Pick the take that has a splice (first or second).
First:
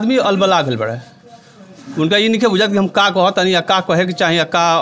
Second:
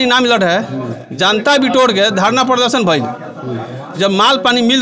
second